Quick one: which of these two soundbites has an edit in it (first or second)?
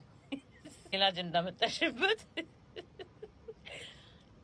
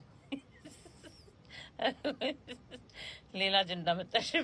first